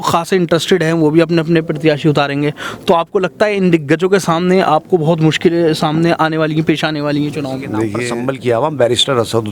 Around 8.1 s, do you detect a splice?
yes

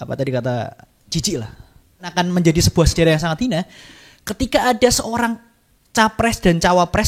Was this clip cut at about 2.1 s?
yes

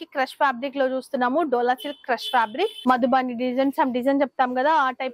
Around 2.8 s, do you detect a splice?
yes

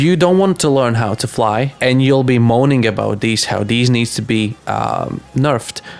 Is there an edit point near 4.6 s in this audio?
no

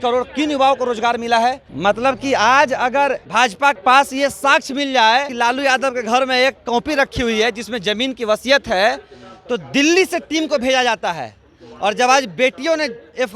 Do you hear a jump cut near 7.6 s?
no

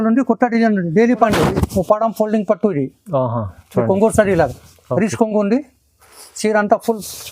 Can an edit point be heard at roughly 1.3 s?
yes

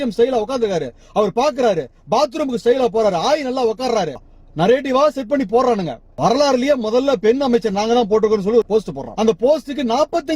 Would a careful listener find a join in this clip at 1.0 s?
no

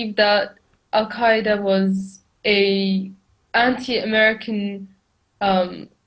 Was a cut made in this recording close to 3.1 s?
yes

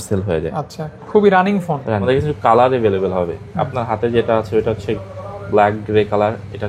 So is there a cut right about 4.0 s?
no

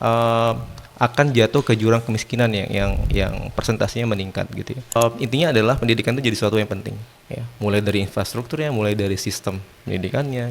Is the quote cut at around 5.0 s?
yes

